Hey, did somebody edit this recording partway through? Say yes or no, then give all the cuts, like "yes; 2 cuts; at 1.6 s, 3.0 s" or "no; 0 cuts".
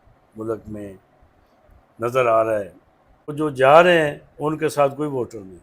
yes; 1 cut; at 3.3 s